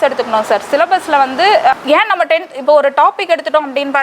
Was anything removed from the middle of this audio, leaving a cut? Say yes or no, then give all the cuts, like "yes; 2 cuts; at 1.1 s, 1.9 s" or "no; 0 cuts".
yes; 1 cut; at 1.7 s